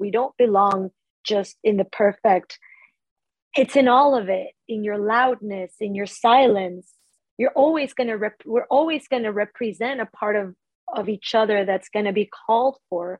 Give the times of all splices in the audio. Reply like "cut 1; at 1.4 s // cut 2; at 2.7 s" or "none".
cut 1; at 2.8 s